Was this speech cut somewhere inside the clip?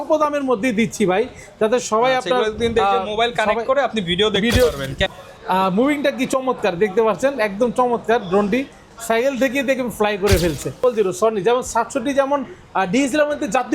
yes; 2 cuts; at 5.0 s, 10.8 s

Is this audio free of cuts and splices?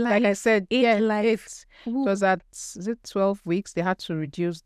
yes; 0 cuts

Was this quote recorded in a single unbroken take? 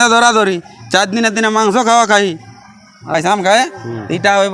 no; 1 cut; at 3.1 s

